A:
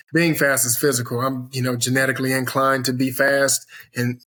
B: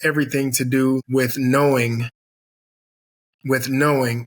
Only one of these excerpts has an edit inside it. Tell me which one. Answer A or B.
B